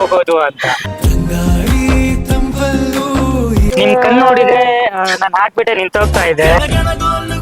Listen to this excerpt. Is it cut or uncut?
cut